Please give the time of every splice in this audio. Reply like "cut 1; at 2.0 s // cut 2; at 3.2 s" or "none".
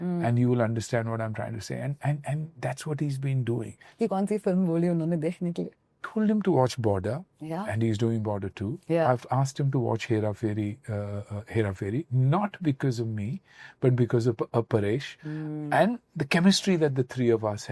cut 1; at 3.9 s // cut 2; at 6.1 s